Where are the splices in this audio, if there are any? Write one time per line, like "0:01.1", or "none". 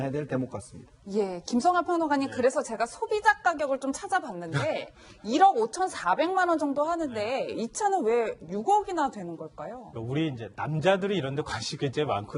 0:05.4

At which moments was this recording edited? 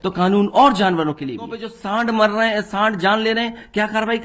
0:01.8

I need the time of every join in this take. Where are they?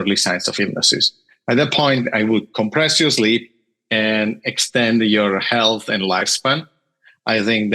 none

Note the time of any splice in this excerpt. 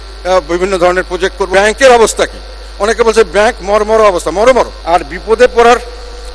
0:01.4
0:04.8

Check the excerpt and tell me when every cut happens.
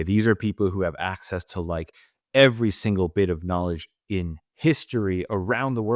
none

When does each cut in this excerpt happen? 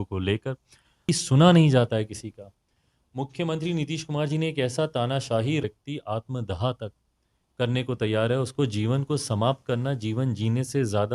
0:01.1
0:05.6

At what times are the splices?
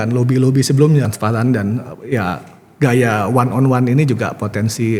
0:01.1

